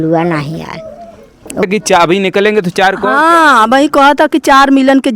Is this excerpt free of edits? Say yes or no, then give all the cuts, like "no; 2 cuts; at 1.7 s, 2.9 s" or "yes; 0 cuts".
no; 1 cut; at 1.7 s